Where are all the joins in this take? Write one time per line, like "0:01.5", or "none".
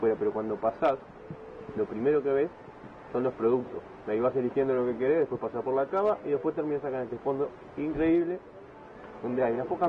none